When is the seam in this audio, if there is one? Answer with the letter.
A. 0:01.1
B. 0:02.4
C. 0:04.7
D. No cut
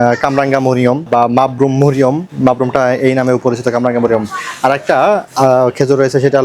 A